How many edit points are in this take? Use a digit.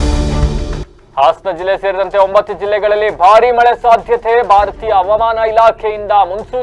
0